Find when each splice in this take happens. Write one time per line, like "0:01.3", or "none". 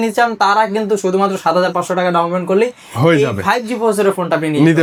none